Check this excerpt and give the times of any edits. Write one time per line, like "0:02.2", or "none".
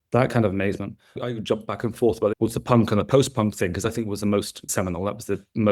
0:01.2
0:02.3

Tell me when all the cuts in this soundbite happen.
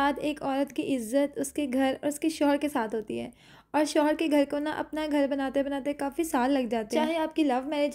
none

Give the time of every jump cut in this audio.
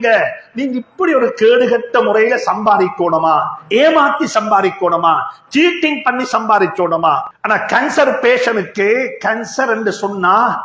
0:07.3

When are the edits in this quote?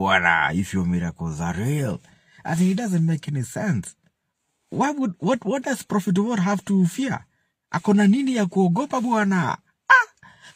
none

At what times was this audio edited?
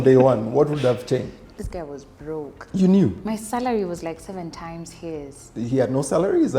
0:01.6

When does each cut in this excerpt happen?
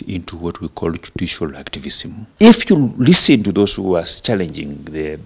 0:02.2

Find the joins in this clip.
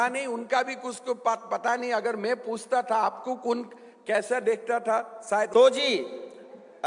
0:05.5

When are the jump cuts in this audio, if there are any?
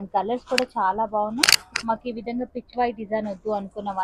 none

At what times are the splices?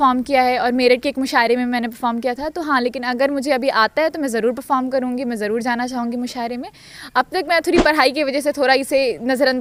none

